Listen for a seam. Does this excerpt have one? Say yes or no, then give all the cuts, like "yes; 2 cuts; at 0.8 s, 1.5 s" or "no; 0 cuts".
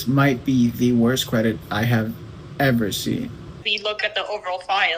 yes; 1 cut; at 3.7 s